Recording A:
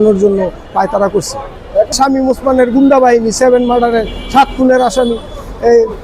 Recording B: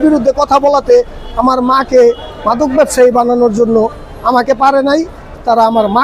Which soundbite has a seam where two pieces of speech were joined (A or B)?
A